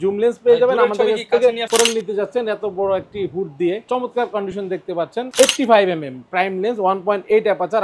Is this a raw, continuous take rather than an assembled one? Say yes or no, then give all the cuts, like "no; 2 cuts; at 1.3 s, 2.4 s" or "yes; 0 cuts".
no; 3 cuts; at 1.7 s, 3.9 s, 5.3 s